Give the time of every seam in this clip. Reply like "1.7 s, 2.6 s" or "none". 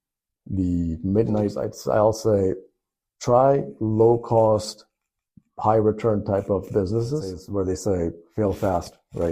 1.7 s, 7.4 s